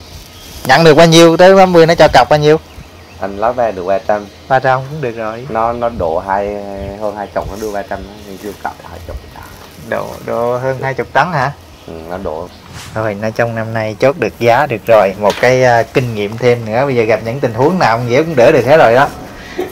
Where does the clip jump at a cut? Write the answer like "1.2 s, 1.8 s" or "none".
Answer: 12.5 s